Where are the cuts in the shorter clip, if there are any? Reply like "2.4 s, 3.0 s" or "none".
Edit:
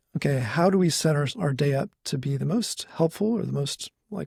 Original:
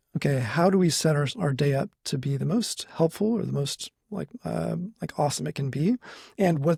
none

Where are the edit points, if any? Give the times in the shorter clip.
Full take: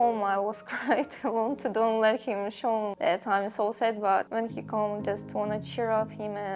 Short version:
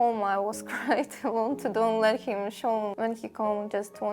2.9 s

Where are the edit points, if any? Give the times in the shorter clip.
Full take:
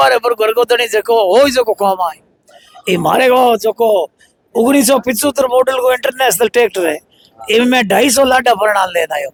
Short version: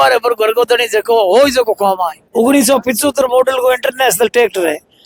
2.2 s

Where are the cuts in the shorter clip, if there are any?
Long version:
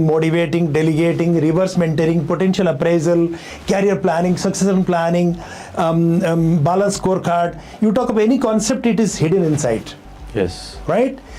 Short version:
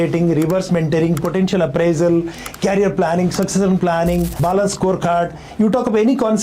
4.4 s

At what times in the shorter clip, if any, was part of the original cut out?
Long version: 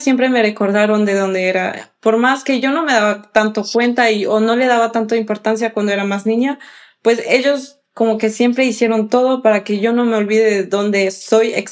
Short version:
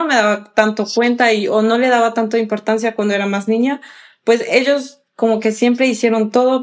none

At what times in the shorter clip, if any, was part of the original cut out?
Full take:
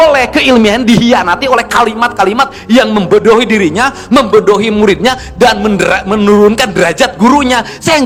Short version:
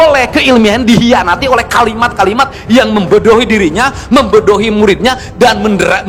none

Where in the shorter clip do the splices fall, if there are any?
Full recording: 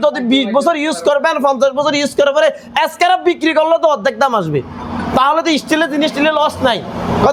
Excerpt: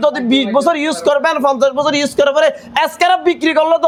none

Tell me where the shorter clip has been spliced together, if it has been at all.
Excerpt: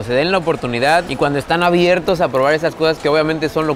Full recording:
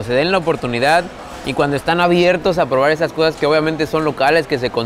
1.1 s

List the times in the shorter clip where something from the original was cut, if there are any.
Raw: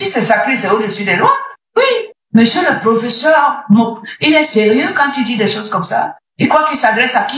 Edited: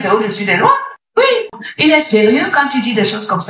1.6 s

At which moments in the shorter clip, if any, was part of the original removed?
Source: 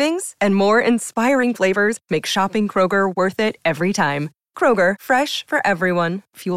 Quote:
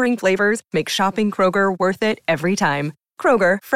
none

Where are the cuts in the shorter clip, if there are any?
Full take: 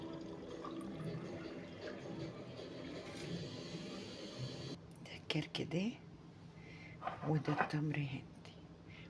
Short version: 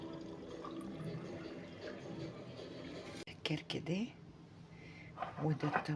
3.2 s

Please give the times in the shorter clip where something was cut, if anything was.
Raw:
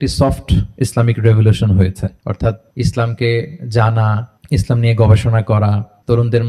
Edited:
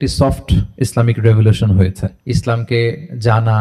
2.1 s

